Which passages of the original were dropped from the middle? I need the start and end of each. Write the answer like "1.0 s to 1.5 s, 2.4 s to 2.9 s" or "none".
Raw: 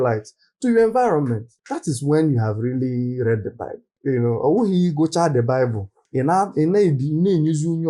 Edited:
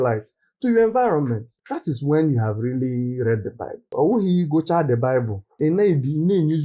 3.9 s to 4.4 s, 6.0 s to 6.5 s